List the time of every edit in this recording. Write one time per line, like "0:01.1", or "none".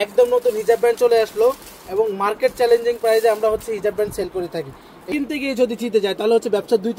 0:05.0